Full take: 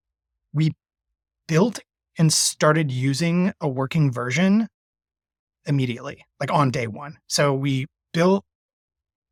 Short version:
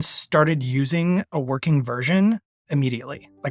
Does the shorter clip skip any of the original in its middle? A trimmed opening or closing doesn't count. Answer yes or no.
yes